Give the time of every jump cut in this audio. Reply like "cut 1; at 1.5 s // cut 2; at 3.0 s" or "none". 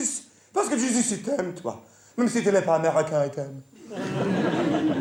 none

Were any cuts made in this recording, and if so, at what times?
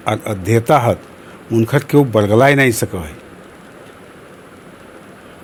none

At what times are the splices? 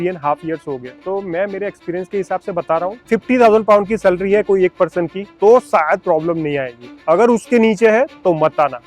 cut 1; at 0.9 s // cut 2; at 3.0 s // cut 3; at 5.2 s

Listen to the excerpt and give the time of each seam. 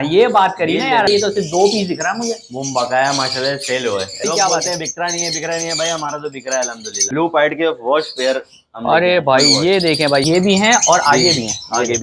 cut 1; at 1.1 s // cut 2; at 4.2 s // cut 3; at 7.0 s // cut 4; at 10.2 s

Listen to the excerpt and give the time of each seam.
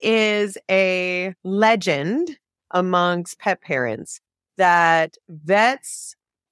cut 1; at 1.3 s

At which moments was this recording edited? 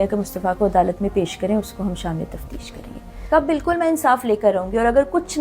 cut 1; at 3.3 s

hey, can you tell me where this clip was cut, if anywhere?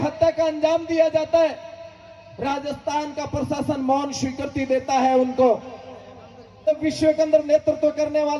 cut 1; at 6.7 s

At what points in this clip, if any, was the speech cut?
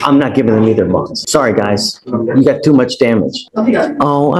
cut 1; at 1.2 s // cut 2; at 3.4 s

